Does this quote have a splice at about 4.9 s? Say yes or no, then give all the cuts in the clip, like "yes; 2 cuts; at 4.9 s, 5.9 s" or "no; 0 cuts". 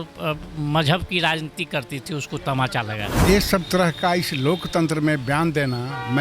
no; 1 cut; at 3.1 s